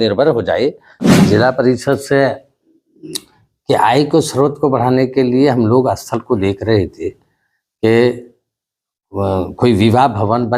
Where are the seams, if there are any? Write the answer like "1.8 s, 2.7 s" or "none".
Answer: 1.1 s